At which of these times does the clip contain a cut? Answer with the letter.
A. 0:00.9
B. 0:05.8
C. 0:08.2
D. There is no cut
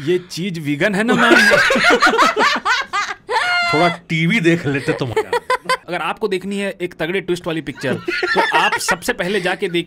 B